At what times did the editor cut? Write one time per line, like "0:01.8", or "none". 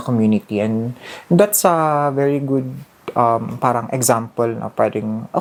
none

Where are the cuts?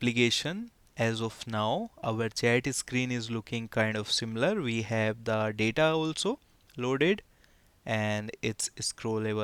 none

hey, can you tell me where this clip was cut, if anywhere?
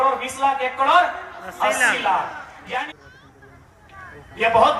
0:02.9

